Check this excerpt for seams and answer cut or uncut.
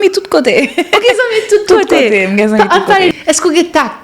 cut